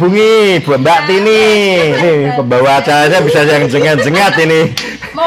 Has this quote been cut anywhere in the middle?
yes; 1 cut; at 2.0 s

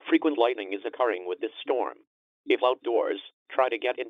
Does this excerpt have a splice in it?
yes; 1 cut; at 1.7 s

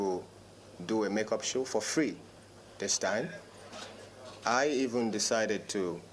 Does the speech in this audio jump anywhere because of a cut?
no; 0 cuts

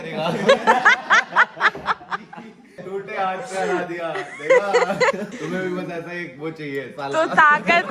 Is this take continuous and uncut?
no; 2 cuts; at 2.7 s, 5.3 s

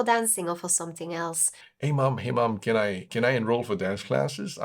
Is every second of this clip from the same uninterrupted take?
no; 1 cut; at 1.6 s

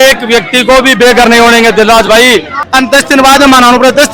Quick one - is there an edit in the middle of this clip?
yes; 1 cut; at 2.6 s

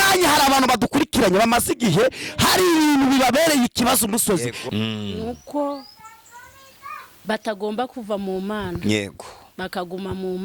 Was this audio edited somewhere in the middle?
yes; 1 cut; at 4.6 s

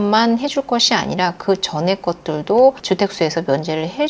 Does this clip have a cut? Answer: no; 0 cuts

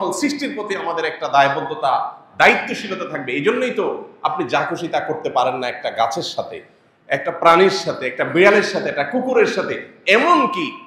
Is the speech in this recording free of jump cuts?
yes; 0 cuts

